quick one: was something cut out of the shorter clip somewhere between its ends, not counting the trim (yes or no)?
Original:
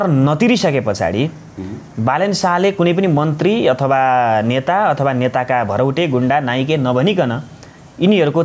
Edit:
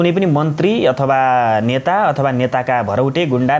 no